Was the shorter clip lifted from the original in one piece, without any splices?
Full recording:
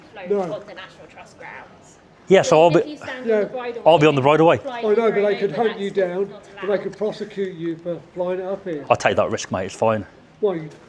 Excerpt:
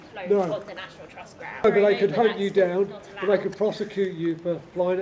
no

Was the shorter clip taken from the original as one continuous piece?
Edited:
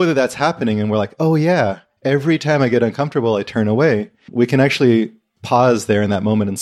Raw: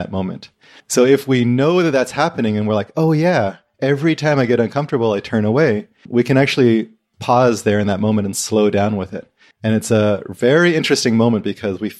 yes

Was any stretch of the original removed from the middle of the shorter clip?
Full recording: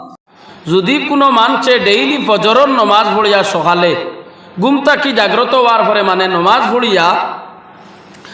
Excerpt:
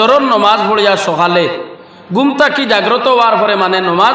no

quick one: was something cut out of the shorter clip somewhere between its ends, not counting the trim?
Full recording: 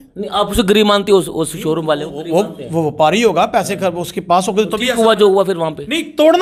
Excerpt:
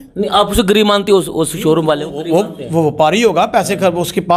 no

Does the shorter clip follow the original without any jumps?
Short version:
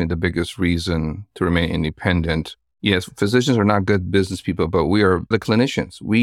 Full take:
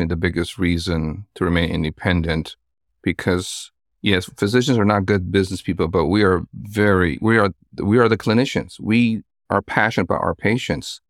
no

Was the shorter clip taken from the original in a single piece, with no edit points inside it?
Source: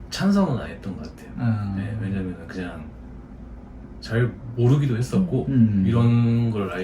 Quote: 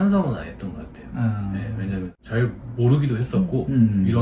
no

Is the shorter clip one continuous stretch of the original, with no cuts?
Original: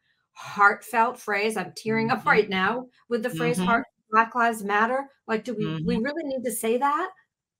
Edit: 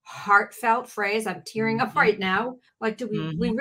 no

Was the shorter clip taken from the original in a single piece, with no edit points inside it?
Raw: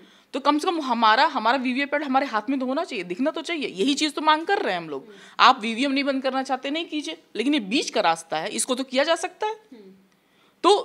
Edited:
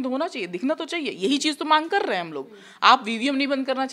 yes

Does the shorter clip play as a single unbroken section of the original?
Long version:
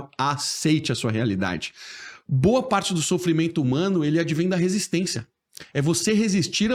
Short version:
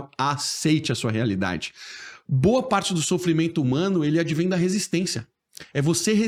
yes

